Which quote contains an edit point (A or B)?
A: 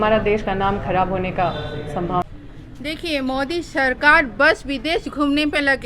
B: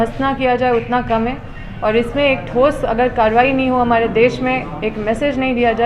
A